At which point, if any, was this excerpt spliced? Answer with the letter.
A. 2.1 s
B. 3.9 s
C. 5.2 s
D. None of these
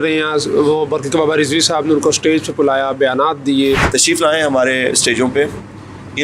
B